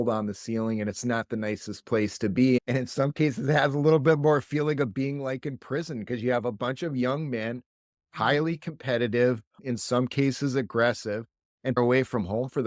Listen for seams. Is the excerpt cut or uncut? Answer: cut